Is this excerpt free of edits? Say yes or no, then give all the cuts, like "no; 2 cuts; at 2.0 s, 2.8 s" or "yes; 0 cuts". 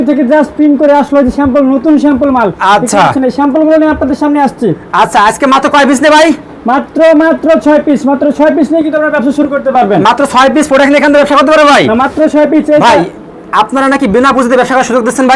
yes; 0 cuts